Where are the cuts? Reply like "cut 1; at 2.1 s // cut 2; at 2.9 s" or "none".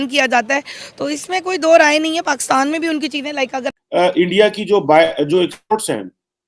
cut 1; at 3.7 s